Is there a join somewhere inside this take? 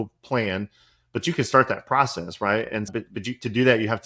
yes; 1 cut; at 2.9 s

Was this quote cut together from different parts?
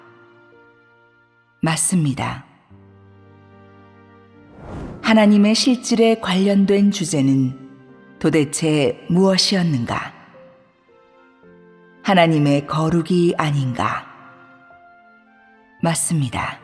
yes; 1 cut; at 6.9 s

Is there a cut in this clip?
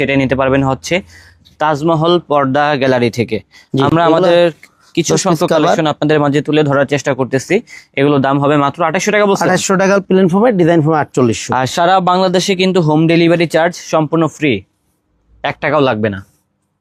no; 0 cuts

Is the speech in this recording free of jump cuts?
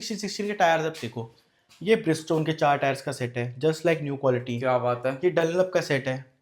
yes; 0 cuts

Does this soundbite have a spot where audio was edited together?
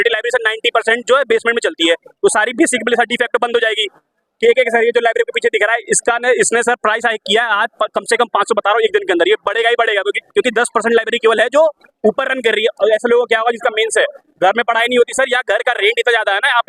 no; 0 cuts

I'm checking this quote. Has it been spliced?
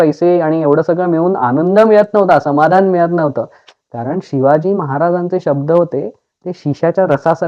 no; 0 cuts

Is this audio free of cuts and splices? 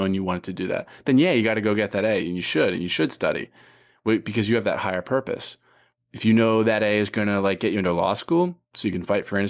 yes; 0 cuts

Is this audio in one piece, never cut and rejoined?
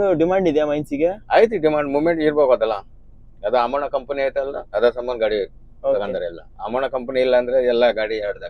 yes; 0 cuts

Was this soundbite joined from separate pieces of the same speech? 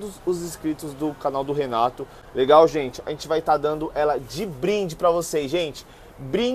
no; 0 cuts

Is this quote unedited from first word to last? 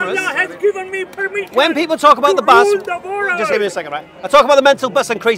yes; 0 cuts

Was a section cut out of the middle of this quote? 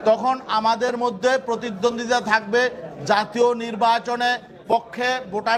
no; 0 cuts

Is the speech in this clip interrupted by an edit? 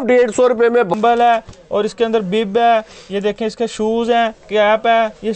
yes; 1 cut; at 0.9 s

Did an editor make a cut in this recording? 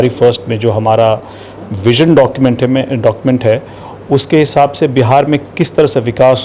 no; 0 cuts

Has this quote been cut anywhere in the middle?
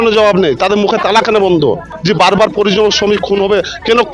yes; 1 cut; at 1.9 s

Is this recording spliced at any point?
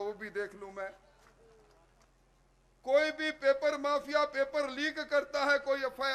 yes; 1 cut; at 2.0 s

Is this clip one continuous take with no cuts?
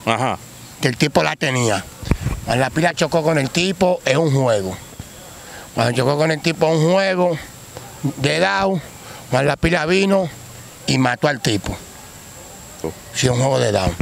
no; 1 cut; at 12.9 s

